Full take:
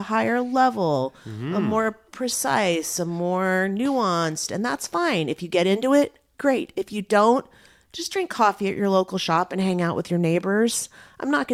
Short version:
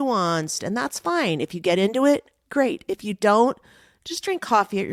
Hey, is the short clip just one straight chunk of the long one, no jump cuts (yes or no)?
yes